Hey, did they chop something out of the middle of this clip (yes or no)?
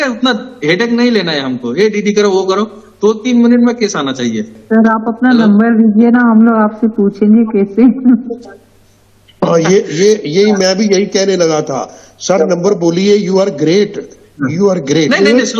yes